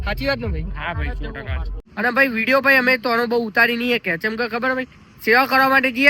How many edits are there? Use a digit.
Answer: 1